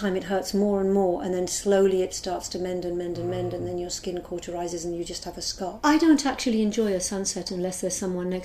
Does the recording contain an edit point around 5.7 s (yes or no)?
yes